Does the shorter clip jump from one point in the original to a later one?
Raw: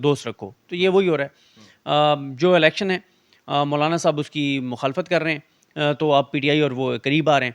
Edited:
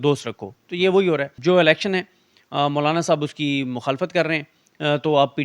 yes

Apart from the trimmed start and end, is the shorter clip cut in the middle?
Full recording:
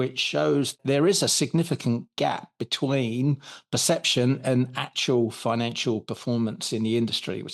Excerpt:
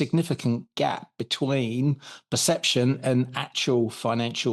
no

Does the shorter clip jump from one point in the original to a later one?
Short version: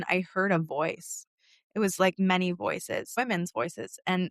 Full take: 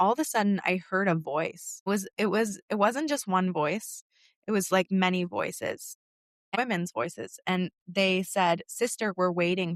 yes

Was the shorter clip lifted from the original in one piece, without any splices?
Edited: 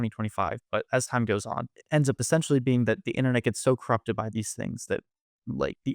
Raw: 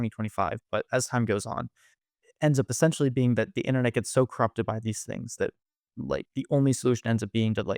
no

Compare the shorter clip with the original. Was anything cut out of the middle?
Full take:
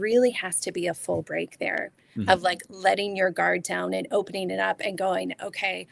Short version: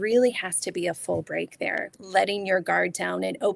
yes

